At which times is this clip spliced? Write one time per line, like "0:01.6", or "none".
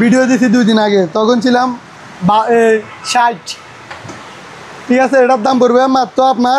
none